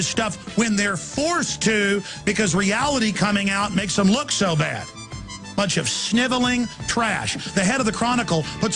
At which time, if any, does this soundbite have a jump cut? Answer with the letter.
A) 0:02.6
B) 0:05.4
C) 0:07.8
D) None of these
A